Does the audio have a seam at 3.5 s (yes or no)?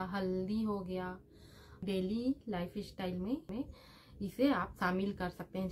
yes